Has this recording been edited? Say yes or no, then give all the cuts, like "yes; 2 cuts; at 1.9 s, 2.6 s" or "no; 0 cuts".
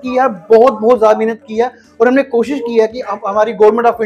no; 0 cuts